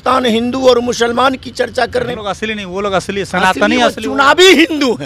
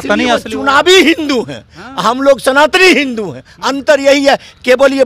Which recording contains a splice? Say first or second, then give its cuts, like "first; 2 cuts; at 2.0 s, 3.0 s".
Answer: first; 1 cut; at 2.1 s